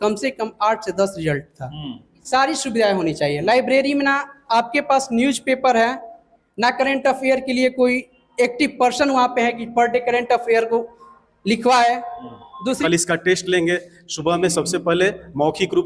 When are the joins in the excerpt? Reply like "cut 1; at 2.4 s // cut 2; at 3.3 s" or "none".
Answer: cut 1; at 2.1 s // cut 2; at 12.8 s